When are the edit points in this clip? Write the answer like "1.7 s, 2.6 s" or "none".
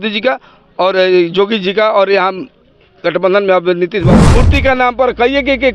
4.2 s